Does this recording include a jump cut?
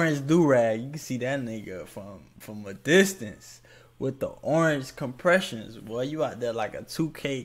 no; 0 cuts

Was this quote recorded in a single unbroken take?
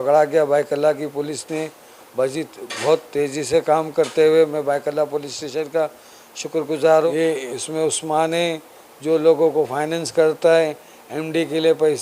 no; 1 cut; at 7.1 s

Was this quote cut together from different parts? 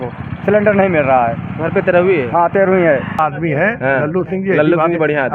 yes; 1 cut; at 3.2 s

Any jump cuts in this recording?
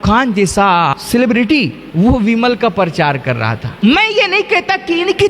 yes; 3 cuts; at 1.0 s, 1.8 s, 3.8 s

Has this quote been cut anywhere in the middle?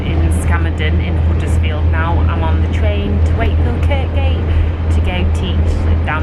no; 0 cuts

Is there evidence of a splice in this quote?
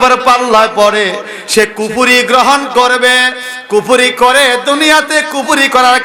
no; 0 cuts

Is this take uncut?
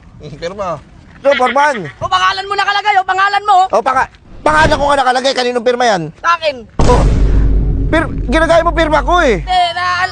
no; 1 cut; at 1.2 s

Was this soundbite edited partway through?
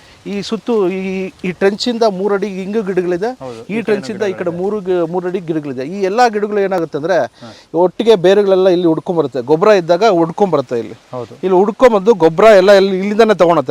no; 0 cuts

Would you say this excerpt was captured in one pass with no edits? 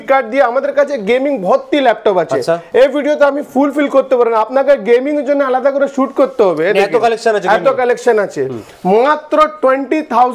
yes; 0 cuts

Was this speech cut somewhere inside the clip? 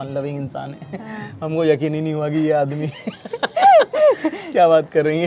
no; 0 cuts

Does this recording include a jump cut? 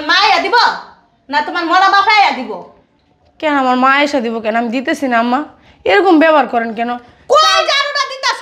no; 0 cuts

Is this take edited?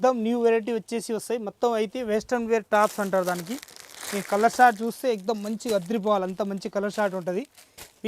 no; 0 cuts

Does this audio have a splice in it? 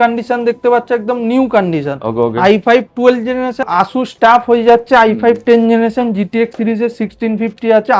yes; 1 cut; at 3.7 s

